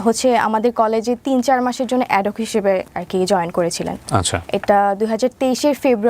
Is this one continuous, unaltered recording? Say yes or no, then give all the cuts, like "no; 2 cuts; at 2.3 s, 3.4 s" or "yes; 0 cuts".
yes; 0 cuts